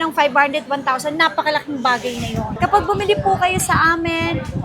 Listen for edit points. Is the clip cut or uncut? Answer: cut